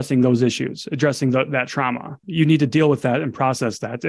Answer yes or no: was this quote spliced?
yes